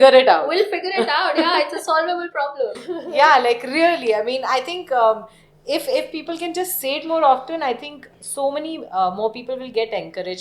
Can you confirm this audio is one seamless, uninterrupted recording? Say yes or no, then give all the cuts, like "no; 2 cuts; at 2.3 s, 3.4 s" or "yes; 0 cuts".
yes; 0 cuts